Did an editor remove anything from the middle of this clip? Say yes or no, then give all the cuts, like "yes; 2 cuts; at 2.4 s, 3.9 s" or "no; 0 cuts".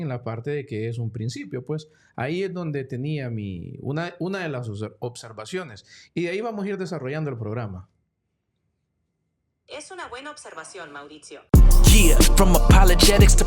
yes; 1 cut; at 11.5 s